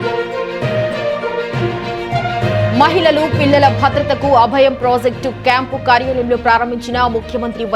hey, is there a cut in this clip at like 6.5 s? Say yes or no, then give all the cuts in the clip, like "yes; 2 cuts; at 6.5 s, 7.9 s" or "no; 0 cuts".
no; 1 cut; at 1.1 s